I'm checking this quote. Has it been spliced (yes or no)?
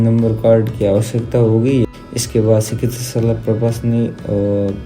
yes